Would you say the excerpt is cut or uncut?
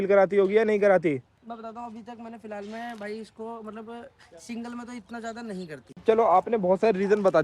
cut